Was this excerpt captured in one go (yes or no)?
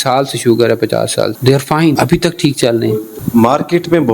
no